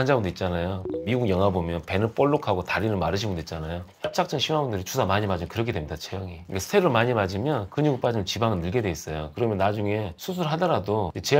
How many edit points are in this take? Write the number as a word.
zero